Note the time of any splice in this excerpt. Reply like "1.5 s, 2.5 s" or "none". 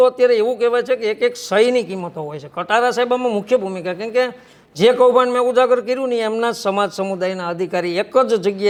none